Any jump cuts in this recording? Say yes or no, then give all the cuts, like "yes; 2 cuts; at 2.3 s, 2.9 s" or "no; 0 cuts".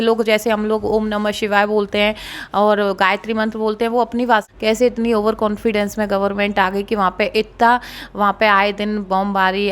yes; 1 cut; at 4.4 s